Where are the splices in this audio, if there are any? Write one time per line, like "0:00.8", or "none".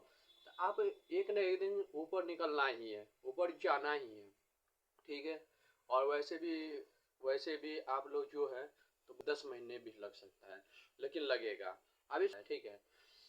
0:09.2
0:12.3